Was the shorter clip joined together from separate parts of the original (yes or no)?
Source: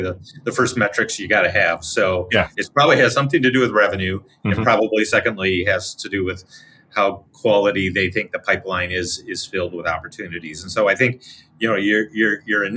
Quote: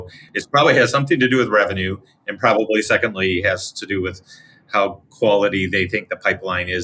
no